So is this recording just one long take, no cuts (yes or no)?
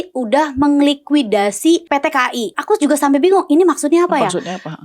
no